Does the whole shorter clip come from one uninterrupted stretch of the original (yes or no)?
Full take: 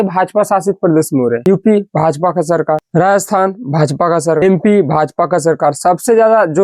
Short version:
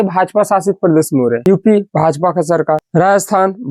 yes